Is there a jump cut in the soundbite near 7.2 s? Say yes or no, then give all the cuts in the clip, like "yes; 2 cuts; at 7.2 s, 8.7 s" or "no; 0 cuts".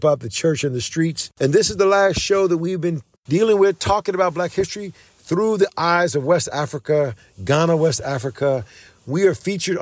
no; 2 cuts; at 1.2 s, 3.1 s